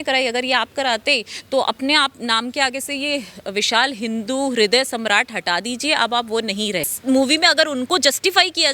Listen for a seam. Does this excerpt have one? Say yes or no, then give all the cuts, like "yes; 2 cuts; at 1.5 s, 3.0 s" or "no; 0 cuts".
yes; 1 cut; at 6.9 s